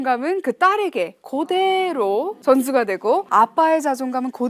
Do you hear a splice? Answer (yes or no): yes